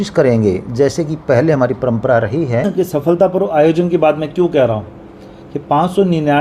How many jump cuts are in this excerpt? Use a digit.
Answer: 1